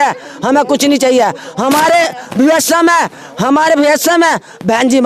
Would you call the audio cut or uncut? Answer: uncut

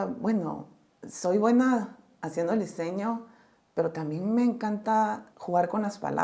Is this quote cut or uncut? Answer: cut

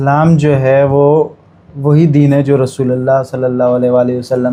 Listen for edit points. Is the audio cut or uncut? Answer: uncut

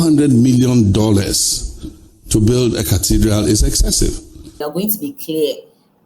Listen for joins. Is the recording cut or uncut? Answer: cut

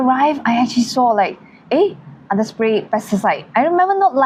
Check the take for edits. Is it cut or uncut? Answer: uncut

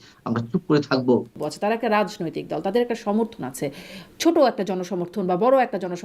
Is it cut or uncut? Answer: cut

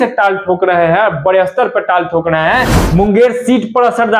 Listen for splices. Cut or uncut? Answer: cut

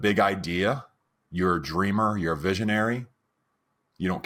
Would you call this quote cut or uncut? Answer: uncut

